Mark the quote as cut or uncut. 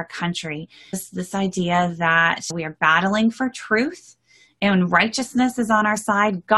cut